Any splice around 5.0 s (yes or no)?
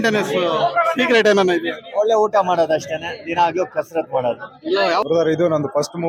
yes